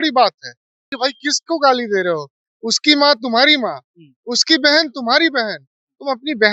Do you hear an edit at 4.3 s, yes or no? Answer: no